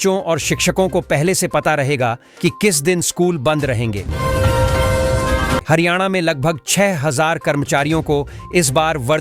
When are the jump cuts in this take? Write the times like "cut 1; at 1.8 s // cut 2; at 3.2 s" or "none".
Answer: cut 1; at 4.0 s // cut 2; at 5.6 s